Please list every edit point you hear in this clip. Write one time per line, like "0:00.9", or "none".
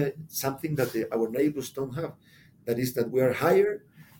0:03.1